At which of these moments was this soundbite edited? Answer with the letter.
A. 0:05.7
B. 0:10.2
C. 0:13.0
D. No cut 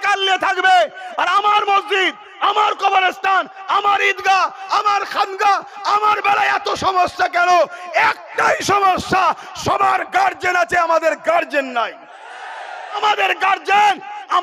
C